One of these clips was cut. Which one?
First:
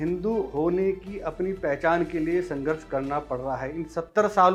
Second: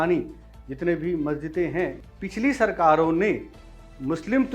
second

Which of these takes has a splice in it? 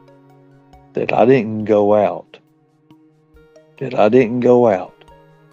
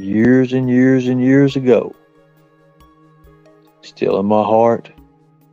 first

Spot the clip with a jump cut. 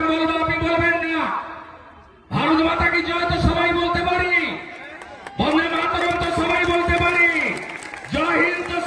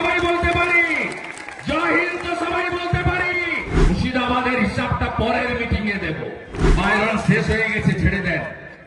second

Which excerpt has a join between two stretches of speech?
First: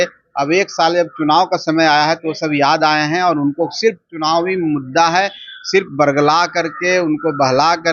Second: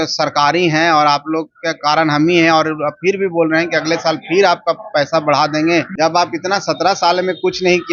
second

